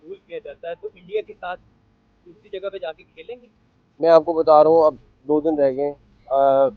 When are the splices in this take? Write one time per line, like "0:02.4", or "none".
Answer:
none